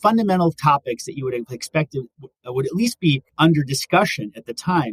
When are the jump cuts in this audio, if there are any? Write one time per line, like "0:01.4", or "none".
none